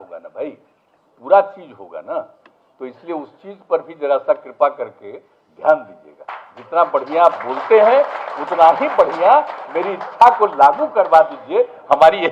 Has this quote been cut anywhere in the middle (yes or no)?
no